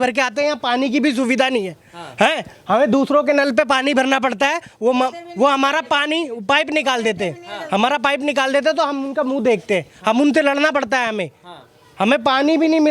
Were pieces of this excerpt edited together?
no; 0 cuts

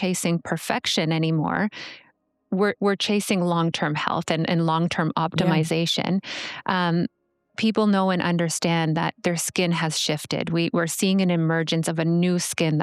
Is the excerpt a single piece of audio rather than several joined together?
yes; 0 cuts

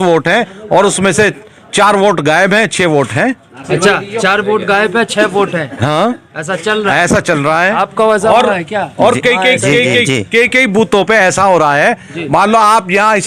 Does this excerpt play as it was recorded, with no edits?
yes; 0 cuts

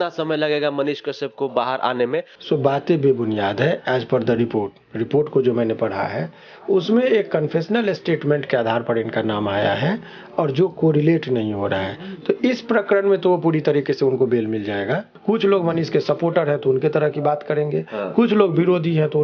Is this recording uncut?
no; 2 cuts; at 2.3 s, 15.1 s

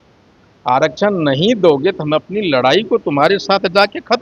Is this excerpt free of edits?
yes; 0 cuts

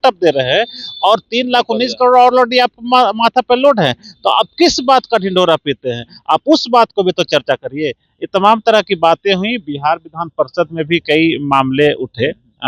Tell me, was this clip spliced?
no; 0 cuts

